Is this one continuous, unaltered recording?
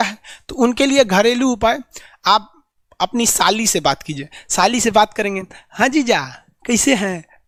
yes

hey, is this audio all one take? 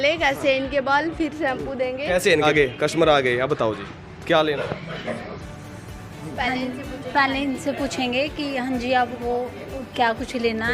no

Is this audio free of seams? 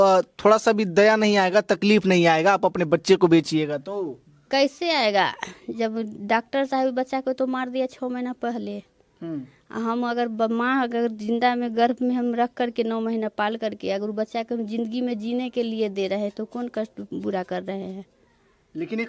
yes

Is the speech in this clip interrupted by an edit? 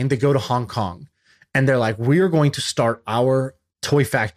no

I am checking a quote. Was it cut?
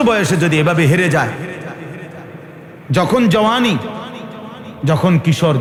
no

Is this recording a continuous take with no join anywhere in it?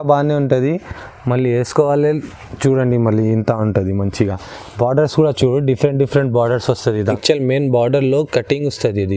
no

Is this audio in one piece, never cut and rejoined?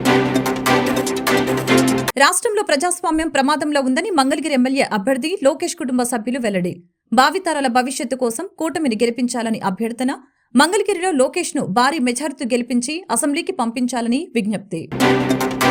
yes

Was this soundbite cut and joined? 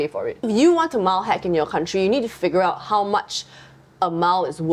no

